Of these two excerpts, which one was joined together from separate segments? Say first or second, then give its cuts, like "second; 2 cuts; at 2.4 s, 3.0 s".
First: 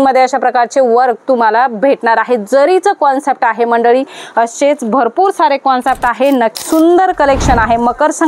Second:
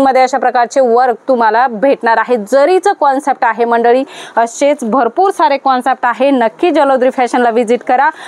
first; 1 cut; at 6.6 s